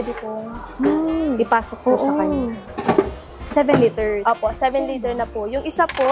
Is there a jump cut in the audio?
no; 0 cuts

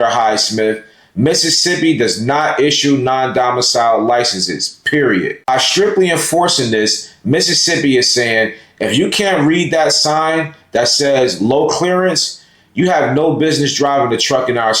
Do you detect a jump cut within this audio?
yes; 1 cut; at 5.5 s

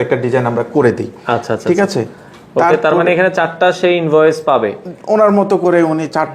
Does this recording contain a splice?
no; 0 cuts

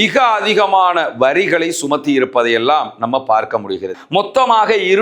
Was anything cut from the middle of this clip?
yes; 1 cut; at 3.9 s

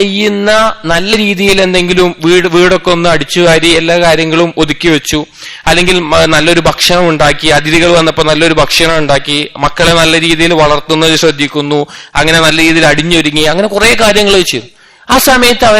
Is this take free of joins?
no; 1 cut; at 1.1 s

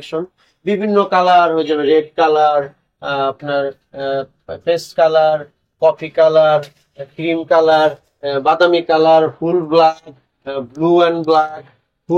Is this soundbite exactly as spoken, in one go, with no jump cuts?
yes; 0 cuts

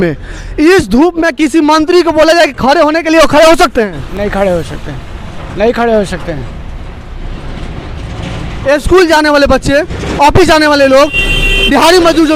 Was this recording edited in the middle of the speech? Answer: no; 0 cuts

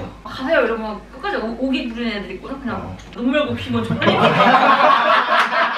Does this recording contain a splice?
no; 0 cuts

